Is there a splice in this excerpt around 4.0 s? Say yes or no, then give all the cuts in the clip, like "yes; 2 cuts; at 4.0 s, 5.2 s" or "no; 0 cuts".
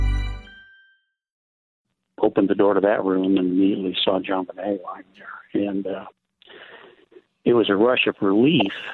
no; 1 cut; at 1.4 s